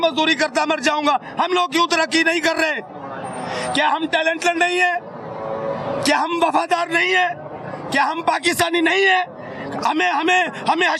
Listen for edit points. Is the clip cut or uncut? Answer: uncut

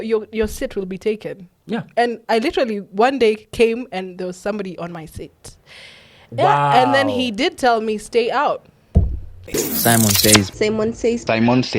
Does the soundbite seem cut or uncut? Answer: cut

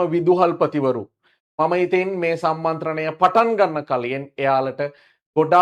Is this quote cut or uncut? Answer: uncut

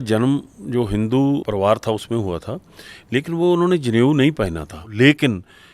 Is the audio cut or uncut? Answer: cut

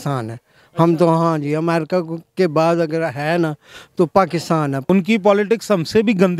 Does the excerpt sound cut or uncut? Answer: cut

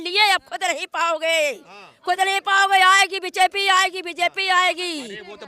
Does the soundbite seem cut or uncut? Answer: uncut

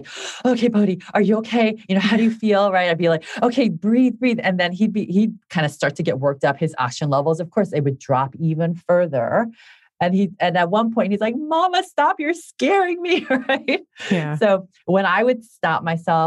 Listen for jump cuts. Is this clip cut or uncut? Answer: uncut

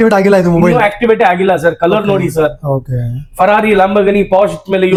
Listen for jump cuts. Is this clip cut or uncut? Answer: uncut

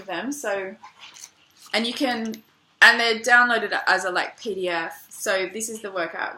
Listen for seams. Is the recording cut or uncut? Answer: uncut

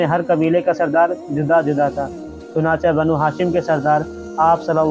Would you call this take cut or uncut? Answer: uncut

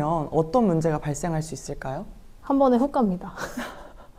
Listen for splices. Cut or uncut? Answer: uncut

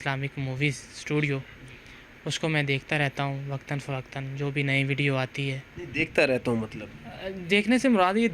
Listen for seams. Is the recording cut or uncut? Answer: uncut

